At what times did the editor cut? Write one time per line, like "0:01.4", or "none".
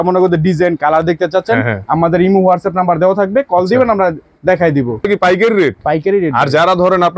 0:05.1